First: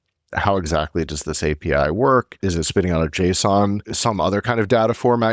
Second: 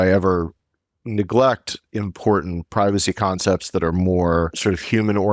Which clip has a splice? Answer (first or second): first